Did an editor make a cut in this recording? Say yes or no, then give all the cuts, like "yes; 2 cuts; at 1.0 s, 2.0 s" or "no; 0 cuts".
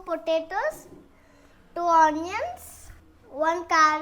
no; 0 cuts